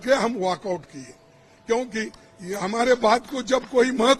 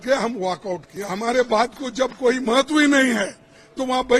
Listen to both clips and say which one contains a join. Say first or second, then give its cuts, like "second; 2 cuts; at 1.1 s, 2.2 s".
second; 1 cut; at 0.9 s